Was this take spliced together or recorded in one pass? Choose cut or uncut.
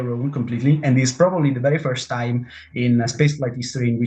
uncut